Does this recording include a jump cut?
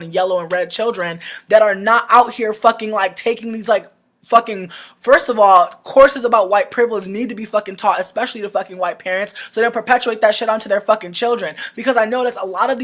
no; 0 cuts

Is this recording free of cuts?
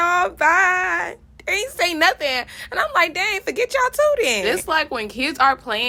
yes; 0 cuts

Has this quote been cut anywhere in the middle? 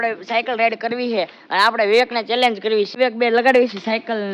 no; 0 cuts

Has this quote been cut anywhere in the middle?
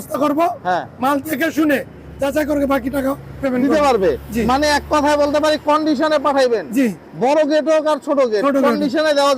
no; 0 cuts

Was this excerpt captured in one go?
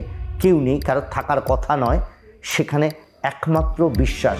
yes; 0 cuts

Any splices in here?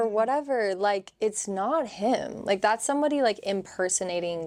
no; 0 cuts

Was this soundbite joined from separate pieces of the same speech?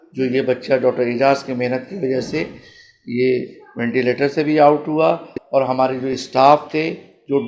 no; 0 cuts

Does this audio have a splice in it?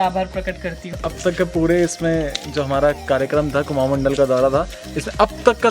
yes; 1 cut; at 1.0 s

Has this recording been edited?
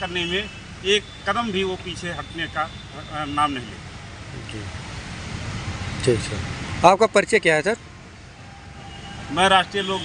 no; 0 cuts

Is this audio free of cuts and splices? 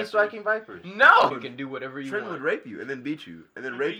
no; 1 cut; at 1.4 s

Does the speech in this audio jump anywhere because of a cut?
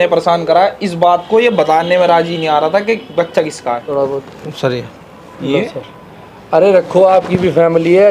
yes; 1 cut; at 3.9 s

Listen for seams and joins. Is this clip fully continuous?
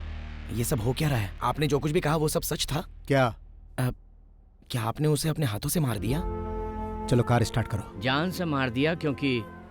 no; 1 cut; at 1.3 s

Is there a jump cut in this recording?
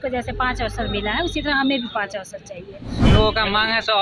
yes; 1 cut; at 2.8 s

